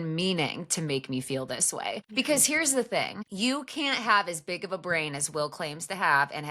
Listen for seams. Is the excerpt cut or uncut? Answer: cut